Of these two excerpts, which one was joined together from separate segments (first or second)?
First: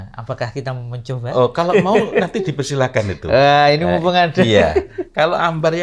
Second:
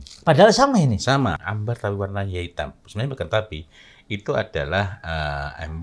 second